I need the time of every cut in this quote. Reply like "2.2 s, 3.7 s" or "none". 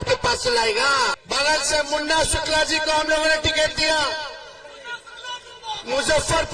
1.2 s